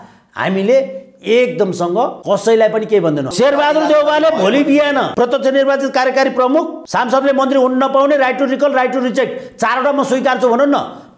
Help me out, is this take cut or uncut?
cut